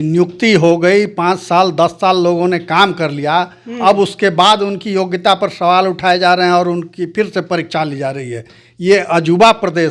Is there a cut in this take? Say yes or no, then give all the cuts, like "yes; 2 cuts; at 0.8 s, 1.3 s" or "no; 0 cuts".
no; 0 cuts